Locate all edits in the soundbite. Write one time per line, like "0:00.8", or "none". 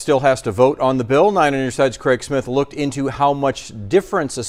none